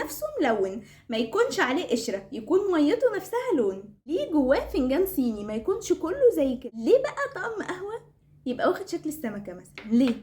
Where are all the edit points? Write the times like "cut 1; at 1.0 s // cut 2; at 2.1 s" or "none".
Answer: cut 1; at 3.9 s // cut 2; at 6.6 s